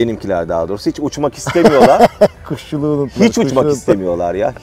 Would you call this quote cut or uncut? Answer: uncut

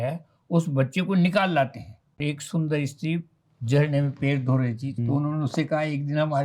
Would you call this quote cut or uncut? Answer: cut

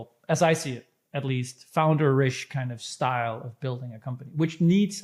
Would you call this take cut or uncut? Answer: uncut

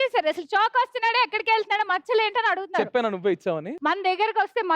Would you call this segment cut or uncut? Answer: cut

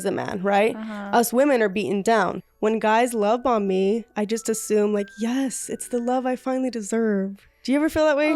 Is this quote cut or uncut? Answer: cut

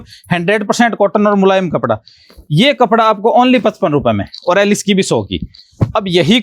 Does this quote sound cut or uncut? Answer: uncut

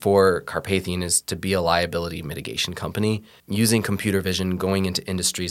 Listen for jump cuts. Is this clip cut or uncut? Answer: cut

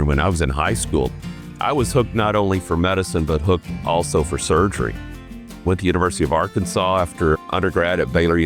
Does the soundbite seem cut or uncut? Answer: uncut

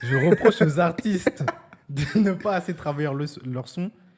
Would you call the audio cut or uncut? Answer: uncut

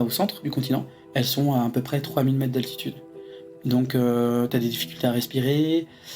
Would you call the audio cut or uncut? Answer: cut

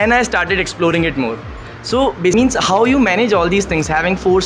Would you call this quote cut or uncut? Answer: cut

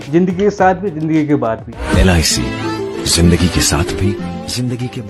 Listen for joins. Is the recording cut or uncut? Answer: uncut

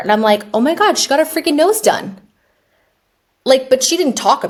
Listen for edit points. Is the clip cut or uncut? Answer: uncut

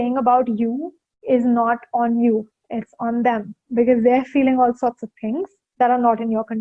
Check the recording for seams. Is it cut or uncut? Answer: cut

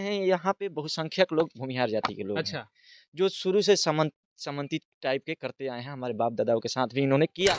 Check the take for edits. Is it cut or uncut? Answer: uncut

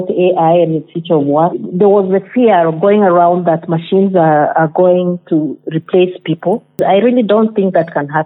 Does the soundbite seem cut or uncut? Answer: cut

